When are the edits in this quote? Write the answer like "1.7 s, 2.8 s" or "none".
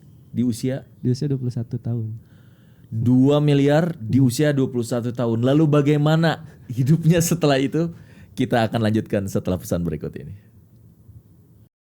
none